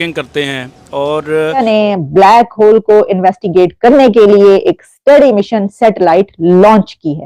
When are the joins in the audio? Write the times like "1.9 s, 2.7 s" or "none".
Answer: 1.6 s